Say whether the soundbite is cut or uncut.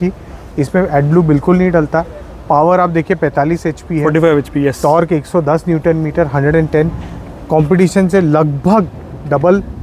uncut